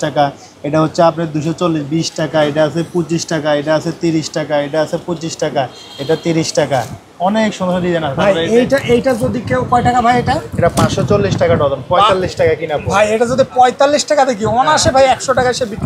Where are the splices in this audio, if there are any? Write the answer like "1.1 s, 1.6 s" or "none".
none